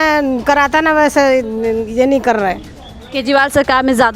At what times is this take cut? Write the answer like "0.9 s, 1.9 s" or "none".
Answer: none